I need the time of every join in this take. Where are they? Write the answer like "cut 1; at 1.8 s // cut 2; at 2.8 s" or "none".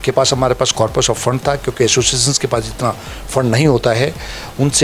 none